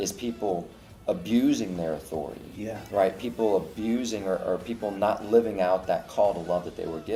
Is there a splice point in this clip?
no; 0 cuts

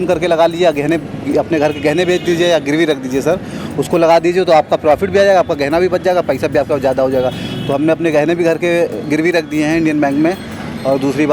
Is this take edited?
no; 0 cuts

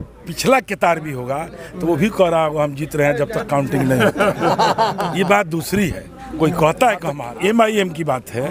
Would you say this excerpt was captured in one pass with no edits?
no; 1 cut; at 7.3 s

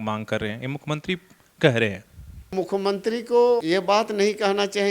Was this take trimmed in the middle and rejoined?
yes; 2 cuts; at 2.5 s, 3.6 s

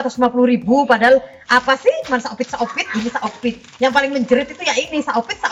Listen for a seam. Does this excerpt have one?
no; 0 cuts

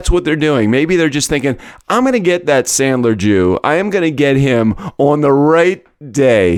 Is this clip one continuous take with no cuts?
yes; 0 cuts

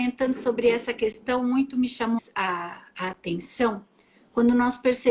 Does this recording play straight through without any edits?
no; 1 cut; at 2.2 s

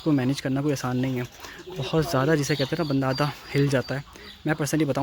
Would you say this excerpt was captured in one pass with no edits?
yes; 0 cuts

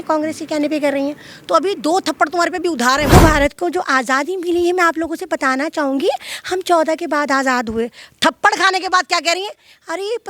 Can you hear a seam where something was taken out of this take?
yes; 1 cut; at 3.1 s

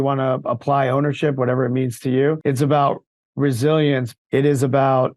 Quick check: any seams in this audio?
yes; 2 cuts; at 2.4 s, 4.1 s

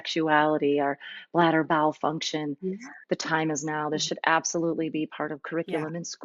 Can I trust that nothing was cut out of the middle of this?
yes; 0 cuts

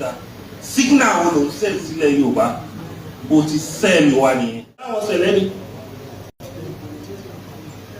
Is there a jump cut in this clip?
yes; 1 cut; at 5.0 s

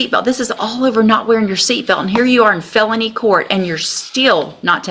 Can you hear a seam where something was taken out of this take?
no; 0 cuts

